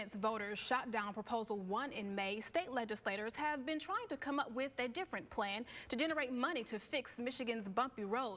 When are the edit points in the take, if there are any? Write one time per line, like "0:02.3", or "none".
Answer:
none